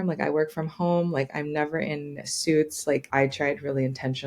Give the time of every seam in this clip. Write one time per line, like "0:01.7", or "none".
0:03.1